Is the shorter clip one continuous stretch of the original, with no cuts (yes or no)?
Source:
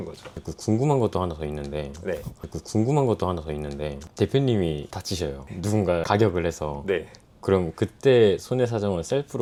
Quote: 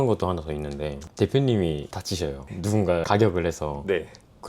no